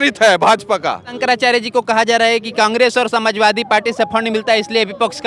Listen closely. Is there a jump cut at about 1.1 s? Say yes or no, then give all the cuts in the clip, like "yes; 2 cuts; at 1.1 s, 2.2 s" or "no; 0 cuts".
yes; 1 cut; at 1.1 s